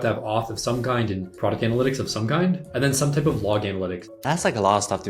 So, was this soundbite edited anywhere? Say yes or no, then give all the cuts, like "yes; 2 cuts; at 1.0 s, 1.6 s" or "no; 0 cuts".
yes; 3 cuts; at 1.3 s, 2.7 s, 4.2 s